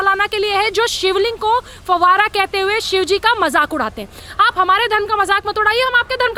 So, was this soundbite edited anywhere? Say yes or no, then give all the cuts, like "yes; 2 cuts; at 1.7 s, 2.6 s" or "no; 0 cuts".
no; 0 cuts